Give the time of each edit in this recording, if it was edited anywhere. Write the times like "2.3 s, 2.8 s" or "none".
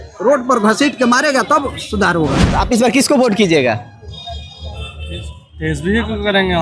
2.4 s